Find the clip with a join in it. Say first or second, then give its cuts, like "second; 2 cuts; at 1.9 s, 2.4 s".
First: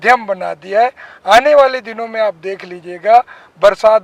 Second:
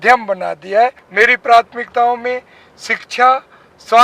second; 1 cut; at 1.0 s